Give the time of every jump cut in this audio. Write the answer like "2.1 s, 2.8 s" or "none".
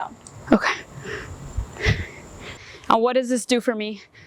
none